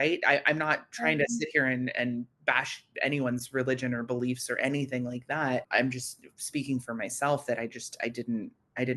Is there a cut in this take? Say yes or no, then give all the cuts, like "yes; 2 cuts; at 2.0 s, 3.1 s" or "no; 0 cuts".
yes; 2 cuts; at 2.3 s, 5.7 s